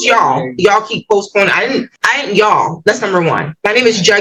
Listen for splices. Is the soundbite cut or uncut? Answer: uncut